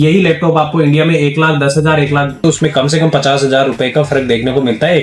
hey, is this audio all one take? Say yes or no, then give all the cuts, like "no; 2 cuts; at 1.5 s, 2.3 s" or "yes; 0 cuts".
no; 1 cut; at 2.4 s